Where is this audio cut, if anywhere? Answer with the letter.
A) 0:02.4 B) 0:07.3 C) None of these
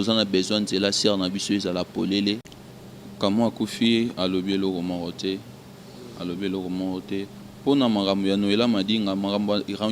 A